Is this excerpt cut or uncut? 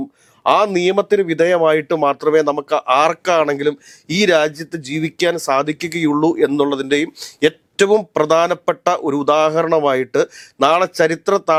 uncut